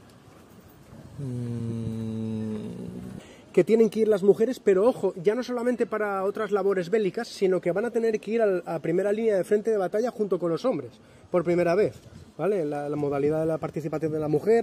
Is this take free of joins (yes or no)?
no